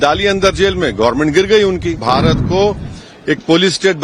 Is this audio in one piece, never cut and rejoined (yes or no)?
no